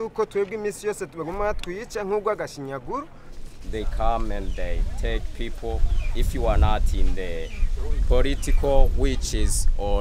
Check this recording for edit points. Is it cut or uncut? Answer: cut